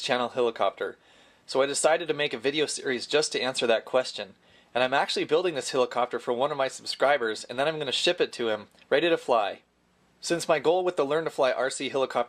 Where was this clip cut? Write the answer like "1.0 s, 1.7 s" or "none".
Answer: 3.9 s